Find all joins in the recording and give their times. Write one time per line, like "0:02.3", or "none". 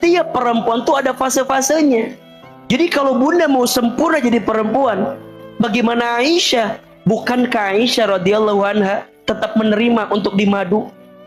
0:05.3
0:06.8